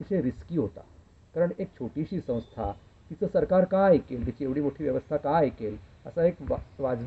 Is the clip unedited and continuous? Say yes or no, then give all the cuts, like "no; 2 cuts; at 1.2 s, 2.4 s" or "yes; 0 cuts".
yes; 0 cuts